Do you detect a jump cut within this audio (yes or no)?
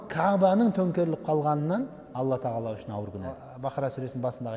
yes